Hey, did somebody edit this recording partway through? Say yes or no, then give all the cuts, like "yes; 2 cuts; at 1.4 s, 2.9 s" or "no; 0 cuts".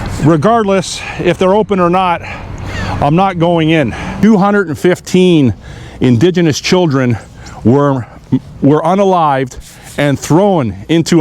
yes; 1 cut; at 4.1 s